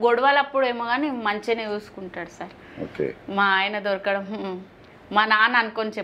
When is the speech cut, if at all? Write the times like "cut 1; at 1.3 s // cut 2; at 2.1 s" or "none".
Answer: none